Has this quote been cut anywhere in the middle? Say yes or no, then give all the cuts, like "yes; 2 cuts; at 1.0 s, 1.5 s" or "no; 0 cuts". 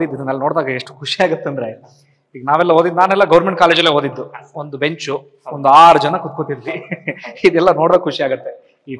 no; 0 cuts